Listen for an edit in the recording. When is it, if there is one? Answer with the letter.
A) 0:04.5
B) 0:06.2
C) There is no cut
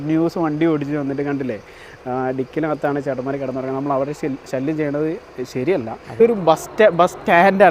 B